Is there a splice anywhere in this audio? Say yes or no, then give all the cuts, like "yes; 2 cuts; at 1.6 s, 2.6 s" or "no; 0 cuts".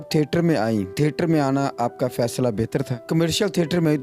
yes; 2 cuts; at 0.9 s, 3.0 s